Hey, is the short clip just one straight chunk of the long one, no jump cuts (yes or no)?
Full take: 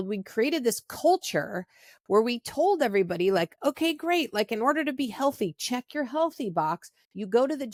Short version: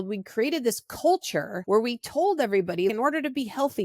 no